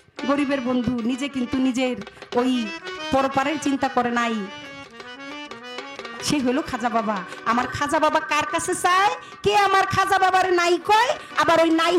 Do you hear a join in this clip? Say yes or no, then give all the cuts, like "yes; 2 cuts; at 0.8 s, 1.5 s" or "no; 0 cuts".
no; 0 cuts